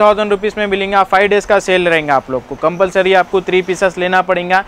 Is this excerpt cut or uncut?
uncut